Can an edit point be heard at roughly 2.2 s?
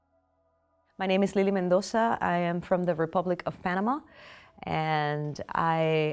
yes; 1 cut; at 2.2 s

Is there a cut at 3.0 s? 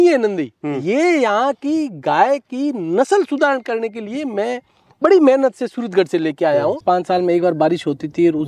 no; 1 cut; at 6.8 s

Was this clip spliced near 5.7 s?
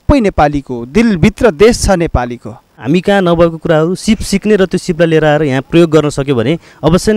no; 1 cut; at 2.8 s

